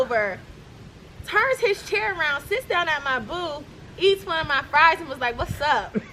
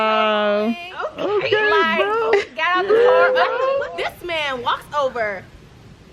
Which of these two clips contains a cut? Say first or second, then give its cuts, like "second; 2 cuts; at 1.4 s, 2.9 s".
second; 1 cut; at 3.8 s